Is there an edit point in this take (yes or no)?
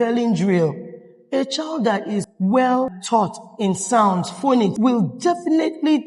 yes